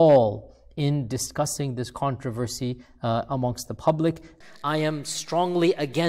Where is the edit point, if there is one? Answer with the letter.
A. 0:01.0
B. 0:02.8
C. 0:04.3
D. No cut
C